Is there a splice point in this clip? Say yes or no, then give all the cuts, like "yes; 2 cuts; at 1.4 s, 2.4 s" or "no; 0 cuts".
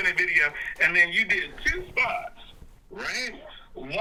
no; 0 cuts